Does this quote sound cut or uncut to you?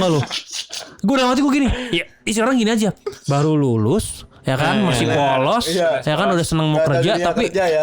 uncut